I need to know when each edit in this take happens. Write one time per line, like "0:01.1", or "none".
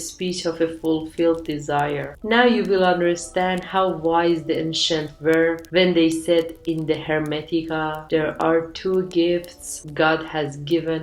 0:02.1